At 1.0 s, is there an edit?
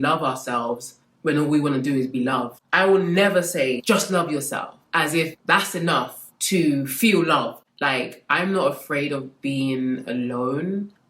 no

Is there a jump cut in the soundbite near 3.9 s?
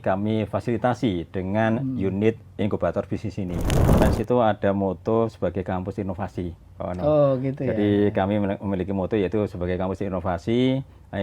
yes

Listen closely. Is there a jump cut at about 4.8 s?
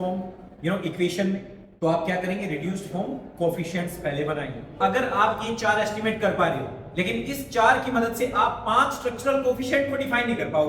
yes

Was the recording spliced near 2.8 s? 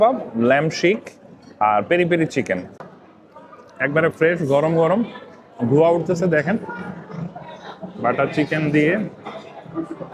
yes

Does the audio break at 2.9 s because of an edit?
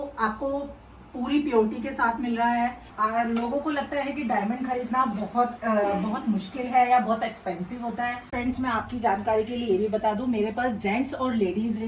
yes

